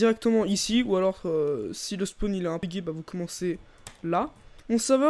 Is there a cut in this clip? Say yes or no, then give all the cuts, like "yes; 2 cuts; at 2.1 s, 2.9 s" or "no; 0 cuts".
yes; 2 cuts; at 2.6 s, 4.3 s